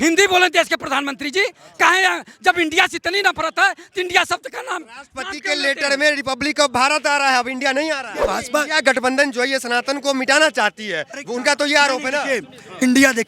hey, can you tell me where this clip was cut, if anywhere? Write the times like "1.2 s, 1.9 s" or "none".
8.4 s